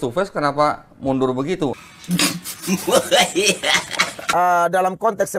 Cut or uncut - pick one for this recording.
cut